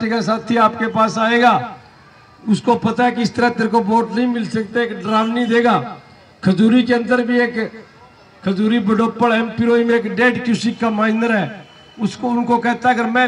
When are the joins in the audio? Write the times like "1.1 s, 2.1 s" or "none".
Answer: none